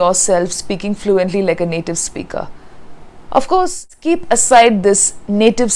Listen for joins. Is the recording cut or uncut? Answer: cut